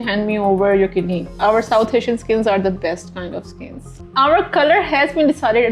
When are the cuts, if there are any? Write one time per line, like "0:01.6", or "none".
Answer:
0:01.3
0:04.0